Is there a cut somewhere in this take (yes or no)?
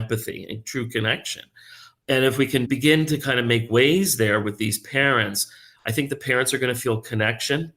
no